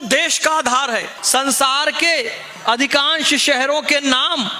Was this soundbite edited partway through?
yes; 1 cut; at 1.1 s

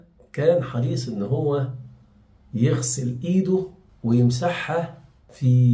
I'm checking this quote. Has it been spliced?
no; 0 cuts

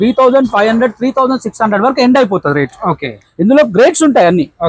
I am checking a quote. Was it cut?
no; 0 cuts

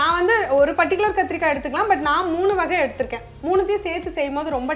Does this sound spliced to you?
yes; 1 cut; at 3.3 s

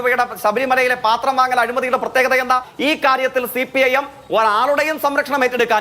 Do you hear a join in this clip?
yes; 1 cut; at 2.7 s

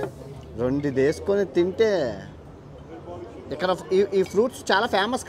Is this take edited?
no; 0 cuts

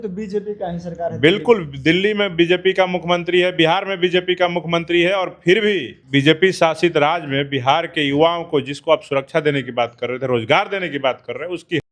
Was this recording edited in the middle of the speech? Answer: yes; 1 cut; at 5.9 s

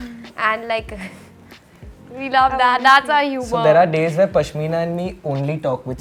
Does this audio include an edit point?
no; 0 cuts

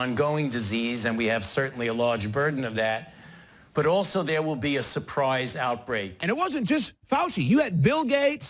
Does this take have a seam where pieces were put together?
yes; 1 cut; at 6.1 s

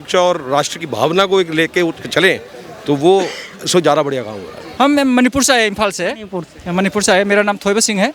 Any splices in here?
yes; 1 cut; at 4.6 s

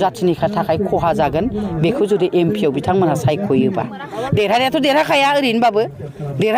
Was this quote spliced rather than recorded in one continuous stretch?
no; 0 cuts

